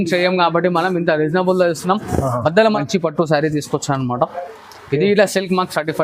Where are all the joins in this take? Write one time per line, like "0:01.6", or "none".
0:02.8